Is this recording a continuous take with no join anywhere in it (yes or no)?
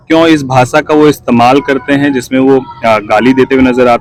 yes